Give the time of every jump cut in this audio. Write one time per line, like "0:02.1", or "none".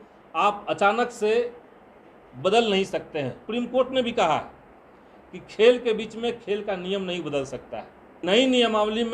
0:03.4
0:08.2